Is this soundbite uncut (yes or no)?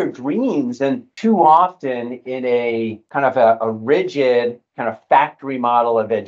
no